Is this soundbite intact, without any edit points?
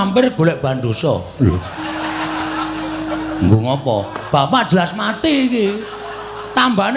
yes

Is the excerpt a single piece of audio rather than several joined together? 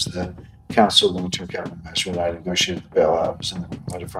yes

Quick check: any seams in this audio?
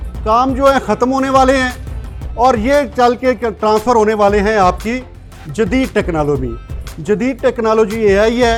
no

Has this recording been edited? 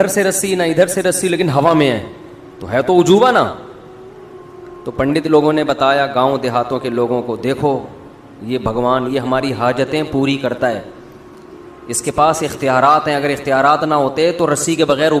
no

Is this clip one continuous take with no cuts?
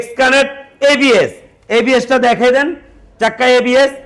yes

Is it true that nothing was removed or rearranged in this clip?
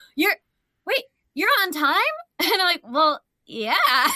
yes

